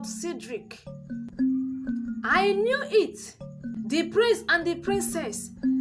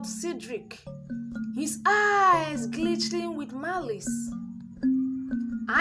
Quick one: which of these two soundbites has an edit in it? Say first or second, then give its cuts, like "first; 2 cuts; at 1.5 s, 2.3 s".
first; 2 cuts; at 1.3 s, 3.7 s